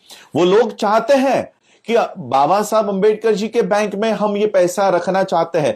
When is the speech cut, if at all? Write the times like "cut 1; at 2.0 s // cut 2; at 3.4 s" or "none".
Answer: none